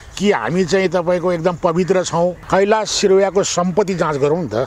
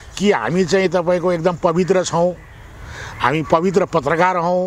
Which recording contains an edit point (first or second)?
first